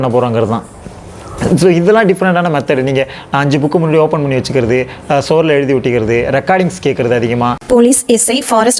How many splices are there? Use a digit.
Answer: 1